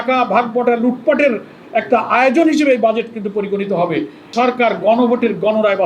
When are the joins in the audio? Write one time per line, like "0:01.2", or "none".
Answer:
0:04.2